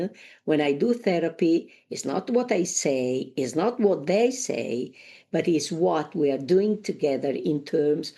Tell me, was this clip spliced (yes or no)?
yes